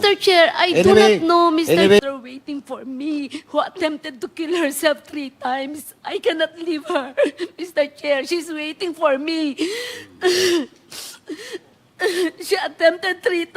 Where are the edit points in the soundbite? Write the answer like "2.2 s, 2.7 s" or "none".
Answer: 2.0 s

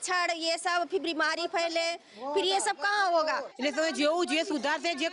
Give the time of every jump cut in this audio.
3.5 s

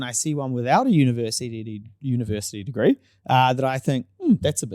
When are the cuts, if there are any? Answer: none

